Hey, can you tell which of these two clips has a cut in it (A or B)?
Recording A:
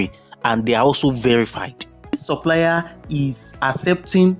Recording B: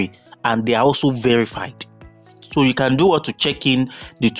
A